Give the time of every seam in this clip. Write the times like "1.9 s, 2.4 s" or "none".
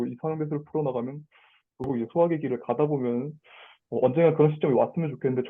1.9 s